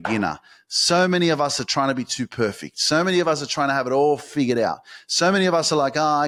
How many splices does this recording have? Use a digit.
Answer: 0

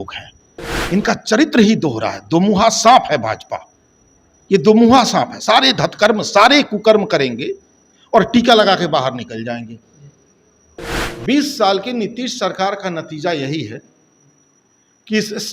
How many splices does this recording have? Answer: 1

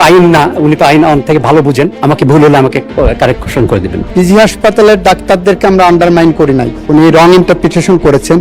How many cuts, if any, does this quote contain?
3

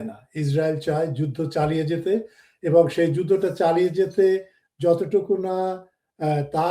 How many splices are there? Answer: 0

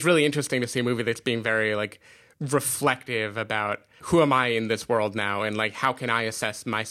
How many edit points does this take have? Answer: 1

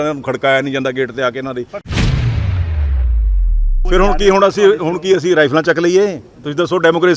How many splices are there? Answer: 2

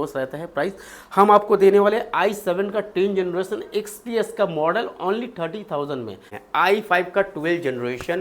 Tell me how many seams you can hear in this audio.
1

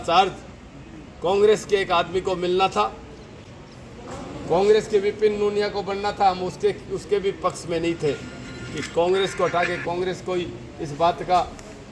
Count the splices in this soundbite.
0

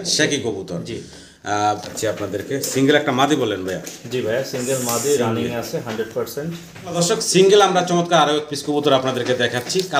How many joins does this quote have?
2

